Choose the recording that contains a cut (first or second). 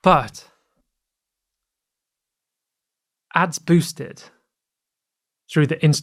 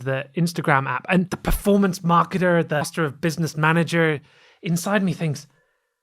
second